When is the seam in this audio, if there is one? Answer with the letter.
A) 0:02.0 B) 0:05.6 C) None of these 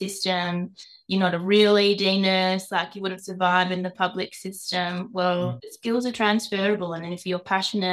B